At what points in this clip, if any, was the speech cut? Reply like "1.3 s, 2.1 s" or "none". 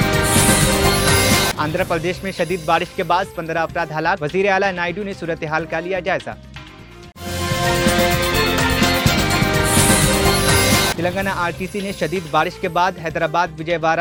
none